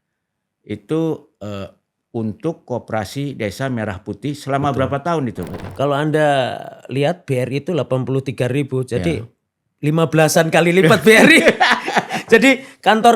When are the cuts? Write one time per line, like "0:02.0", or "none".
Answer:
0:05.6

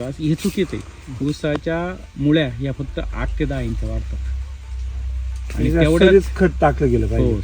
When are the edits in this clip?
none

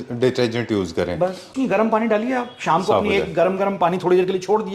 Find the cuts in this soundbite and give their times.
0:01.5

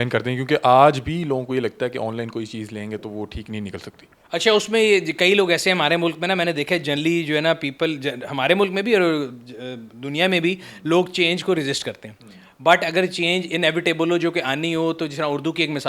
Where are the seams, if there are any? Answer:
none

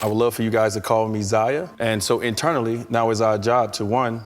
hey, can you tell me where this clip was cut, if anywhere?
0:01.7

